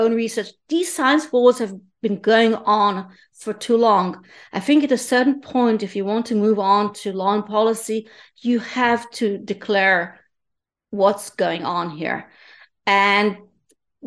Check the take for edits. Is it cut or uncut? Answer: uncut